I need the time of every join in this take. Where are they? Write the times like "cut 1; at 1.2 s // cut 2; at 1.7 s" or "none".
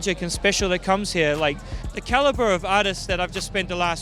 none